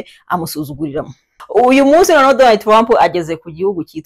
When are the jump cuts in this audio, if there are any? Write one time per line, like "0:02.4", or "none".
0:01.3